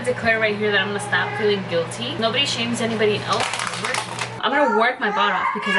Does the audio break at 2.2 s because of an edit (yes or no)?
yes